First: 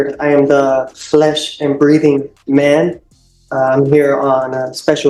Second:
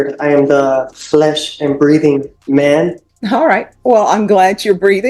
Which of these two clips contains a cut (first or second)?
second